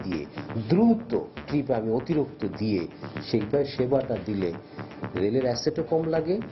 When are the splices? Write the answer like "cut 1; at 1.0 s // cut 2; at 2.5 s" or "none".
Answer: none